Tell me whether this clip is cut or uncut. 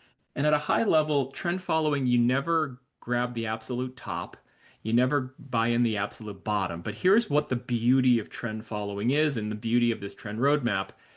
uncut